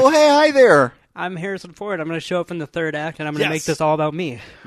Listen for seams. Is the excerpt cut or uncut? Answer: uncut